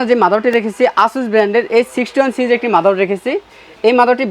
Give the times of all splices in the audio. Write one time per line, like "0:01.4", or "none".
none